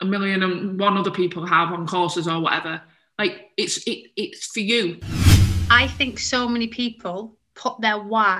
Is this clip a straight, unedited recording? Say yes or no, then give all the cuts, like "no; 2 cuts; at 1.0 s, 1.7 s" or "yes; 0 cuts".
no; 1 cut; at 5.2 s